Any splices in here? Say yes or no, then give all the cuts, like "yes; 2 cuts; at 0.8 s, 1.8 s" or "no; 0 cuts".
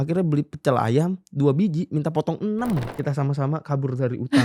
yes; 1 cut; at 2.9 s